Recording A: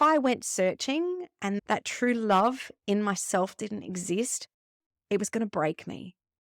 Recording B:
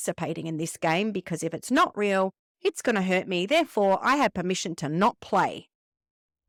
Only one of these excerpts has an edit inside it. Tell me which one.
A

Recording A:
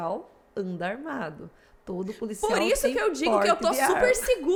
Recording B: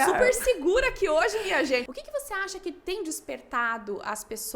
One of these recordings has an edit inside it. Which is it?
B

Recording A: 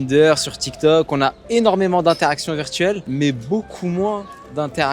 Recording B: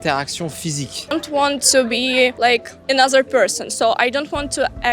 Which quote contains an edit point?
B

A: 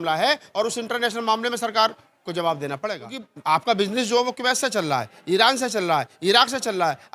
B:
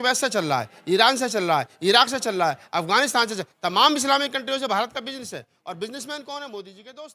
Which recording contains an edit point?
A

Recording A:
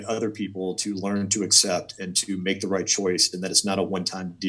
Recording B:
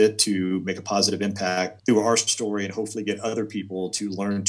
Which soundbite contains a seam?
B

